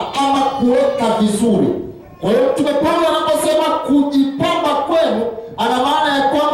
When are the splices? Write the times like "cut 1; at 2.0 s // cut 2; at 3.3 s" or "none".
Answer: none